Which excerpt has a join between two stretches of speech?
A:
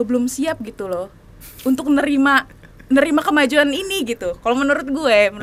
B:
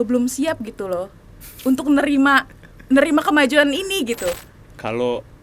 B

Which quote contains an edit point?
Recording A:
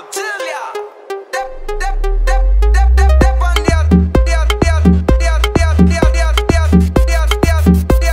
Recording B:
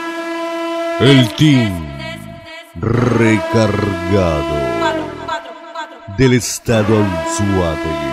B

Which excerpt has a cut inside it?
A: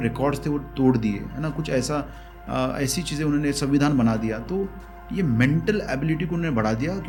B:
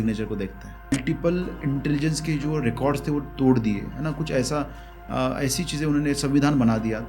B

